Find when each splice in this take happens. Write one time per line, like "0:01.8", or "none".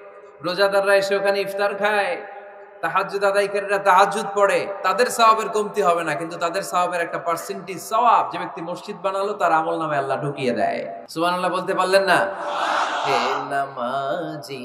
0:11.0